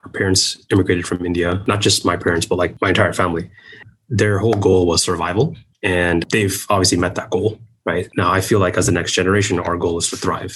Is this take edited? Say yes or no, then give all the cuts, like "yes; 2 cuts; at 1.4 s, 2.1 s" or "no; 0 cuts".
no; 0 cuts